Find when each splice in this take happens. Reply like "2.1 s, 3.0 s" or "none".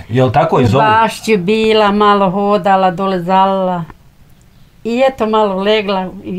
none